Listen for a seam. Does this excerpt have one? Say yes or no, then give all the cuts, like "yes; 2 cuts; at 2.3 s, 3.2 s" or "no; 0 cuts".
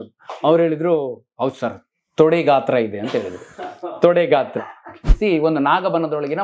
yes; 1 cut; at 5.2 s